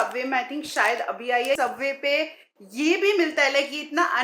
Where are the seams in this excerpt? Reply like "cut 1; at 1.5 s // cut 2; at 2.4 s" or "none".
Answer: cut 1; at 1.6 s